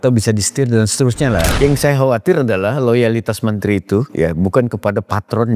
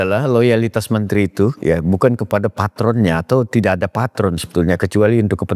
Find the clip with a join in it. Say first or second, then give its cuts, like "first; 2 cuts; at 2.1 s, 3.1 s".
first; 1 cut; at 1.5 s